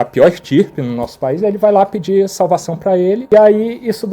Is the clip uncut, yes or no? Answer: no